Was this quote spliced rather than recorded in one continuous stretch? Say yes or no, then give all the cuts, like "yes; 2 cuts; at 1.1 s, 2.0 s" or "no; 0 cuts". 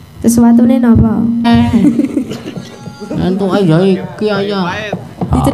yes; 1 cut; at 1.5 s